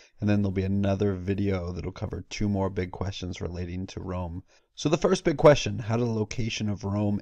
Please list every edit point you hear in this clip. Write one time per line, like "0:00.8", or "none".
none